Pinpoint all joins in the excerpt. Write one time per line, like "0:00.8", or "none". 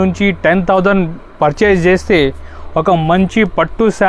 none